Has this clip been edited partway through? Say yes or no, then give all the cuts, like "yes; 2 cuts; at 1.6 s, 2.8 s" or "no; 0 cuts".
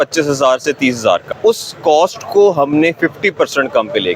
yes; 1 cut; at 1.2 s